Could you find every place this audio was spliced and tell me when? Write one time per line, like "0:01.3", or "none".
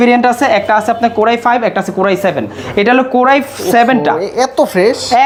none